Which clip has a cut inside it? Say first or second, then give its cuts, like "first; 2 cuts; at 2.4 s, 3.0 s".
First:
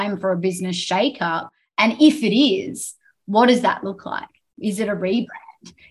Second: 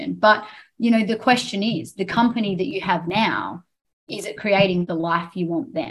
second; 1 cut; at 4.8 s